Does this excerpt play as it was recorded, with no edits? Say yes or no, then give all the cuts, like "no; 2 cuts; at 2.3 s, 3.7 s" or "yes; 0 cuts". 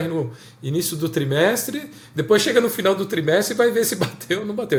yes; 0 cuts